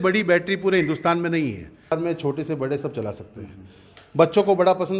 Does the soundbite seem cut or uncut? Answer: cut